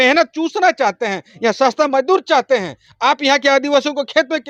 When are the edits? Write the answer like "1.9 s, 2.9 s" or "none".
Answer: none